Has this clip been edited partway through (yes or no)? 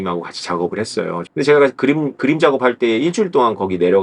yes